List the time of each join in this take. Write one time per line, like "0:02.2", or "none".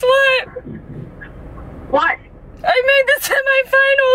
none